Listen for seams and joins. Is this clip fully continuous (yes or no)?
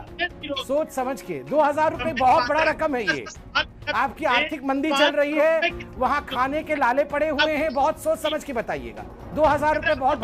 yes